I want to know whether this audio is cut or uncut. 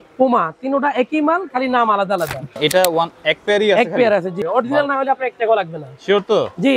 cut